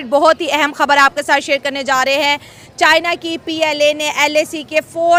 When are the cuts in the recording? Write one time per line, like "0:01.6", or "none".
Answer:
none